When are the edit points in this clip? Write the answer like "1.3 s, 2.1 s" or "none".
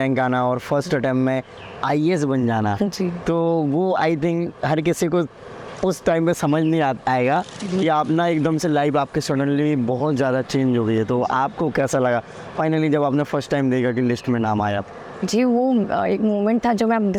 none

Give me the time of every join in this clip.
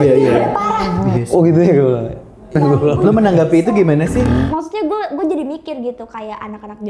2.6 s, 4.3 s

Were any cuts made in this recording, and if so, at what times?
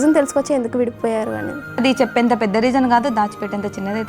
1.8 s

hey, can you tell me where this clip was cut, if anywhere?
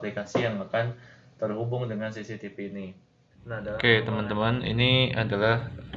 3.6 s

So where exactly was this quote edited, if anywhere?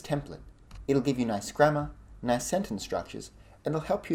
none

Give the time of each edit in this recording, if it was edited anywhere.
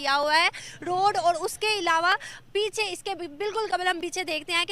none

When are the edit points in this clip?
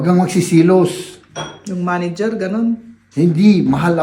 none

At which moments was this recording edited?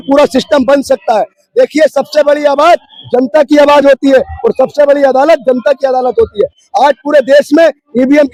none

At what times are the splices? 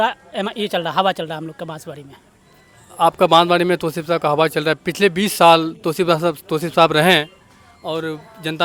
none

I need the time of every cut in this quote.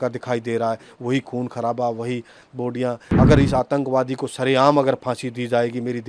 3.1 s

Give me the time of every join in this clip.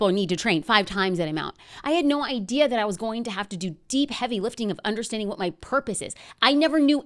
none

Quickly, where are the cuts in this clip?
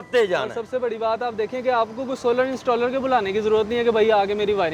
none

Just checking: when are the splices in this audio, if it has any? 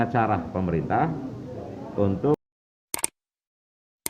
2.5 s

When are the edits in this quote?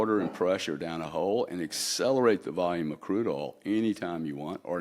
none

